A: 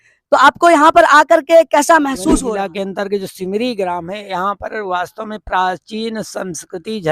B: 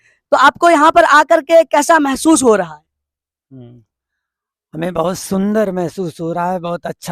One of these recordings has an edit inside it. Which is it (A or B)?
A